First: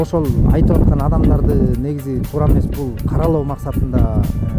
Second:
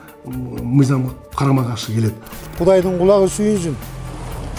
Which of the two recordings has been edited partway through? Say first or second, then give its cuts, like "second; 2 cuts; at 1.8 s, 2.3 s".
second; 1 cut; at 2.4 s